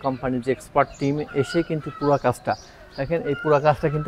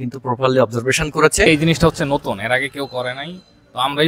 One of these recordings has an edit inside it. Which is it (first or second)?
second